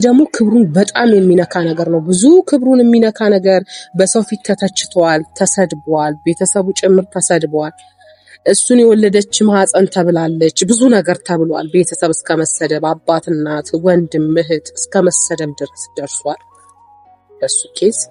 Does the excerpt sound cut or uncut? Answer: uncut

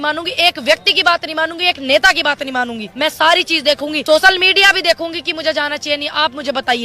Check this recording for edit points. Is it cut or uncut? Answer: cut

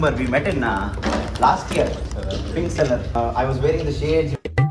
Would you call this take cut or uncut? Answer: uncut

